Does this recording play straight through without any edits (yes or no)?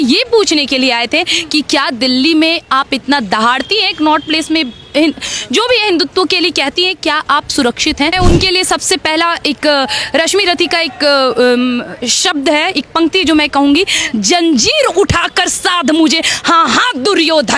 no